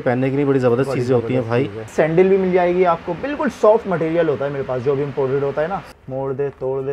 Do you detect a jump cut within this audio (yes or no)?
yes